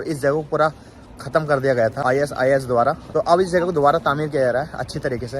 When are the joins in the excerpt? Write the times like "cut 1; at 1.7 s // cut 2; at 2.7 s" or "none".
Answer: cut 1; at 2.0 s // cut 2; at 3.0 s